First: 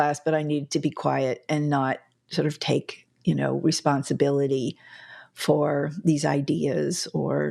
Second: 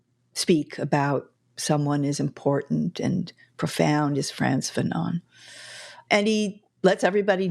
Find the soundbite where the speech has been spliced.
second; 1 cut; at 6.0 s

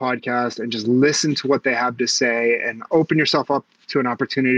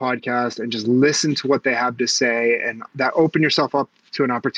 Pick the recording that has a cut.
first; 1 cut; at 2.9 s

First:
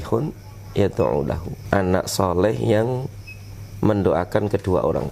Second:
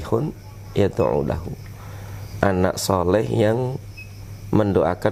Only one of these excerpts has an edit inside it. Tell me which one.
first; 1 cut; at 1.5 s

